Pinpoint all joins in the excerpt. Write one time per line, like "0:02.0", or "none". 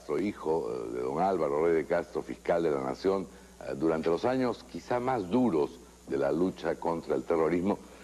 0:05.1